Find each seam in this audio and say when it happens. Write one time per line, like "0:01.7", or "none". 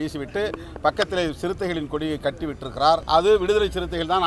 0:03.0